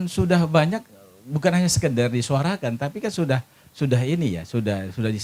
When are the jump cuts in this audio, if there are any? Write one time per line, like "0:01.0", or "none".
none